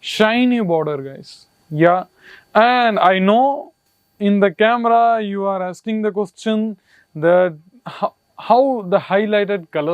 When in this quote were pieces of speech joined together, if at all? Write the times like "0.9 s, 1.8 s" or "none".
none

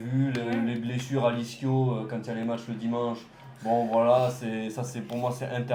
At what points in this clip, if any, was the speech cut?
none

